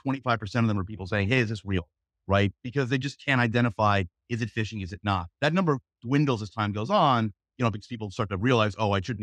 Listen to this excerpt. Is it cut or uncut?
uncut